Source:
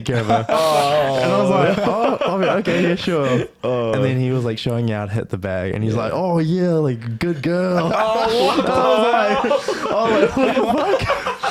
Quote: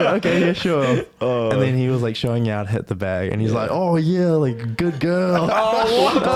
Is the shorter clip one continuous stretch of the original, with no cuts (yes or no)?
yes